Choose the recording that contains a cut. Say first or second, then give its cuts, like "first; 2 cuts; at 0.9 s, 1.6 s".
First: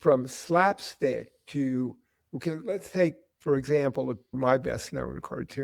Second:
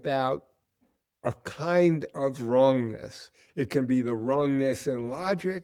first; 1 cut; at 4.3 s